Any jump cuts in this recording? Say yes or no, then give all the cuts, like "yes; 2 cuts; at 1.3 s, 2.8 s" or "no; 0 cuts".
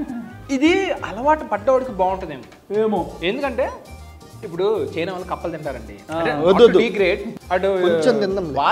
no; 0 cuts